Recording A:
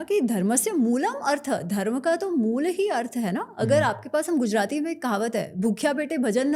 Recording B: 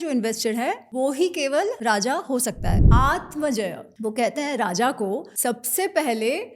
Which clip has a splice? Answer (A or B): B